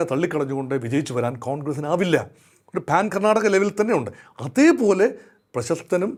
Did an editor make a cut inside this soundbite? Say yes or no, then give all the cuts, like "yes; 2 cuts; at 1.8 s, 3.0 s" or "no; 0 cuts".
no; 0 cuts